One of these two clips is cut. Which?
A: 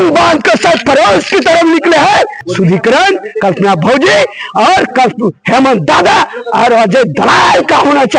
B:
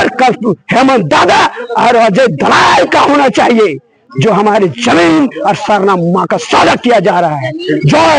A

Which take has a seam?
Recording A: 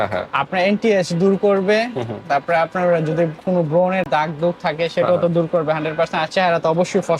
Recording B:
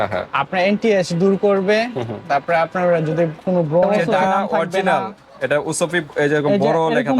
B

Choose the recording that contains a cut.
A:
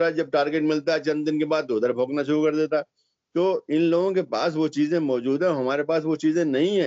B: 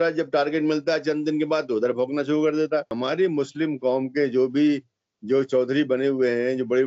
B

